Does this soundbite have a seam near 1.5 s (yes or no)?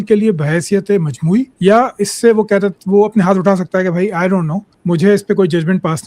yes